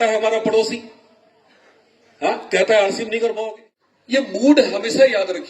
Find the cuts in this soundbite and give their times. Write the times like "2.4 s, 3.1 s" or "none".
3.7 s